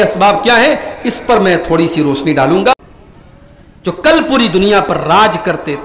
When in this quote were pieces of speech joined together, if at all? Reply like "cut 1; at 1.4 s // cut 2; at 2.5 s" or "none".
cut 1; at 2.7 s